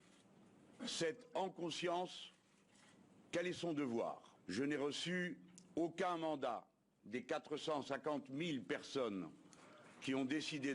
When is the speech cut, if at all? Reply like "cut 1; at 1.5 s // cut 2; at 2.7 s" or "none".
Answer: cut 1; at 4.3 s